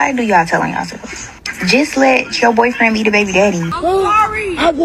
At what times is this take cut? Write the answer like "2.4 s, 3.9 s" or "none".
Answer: 3.7 s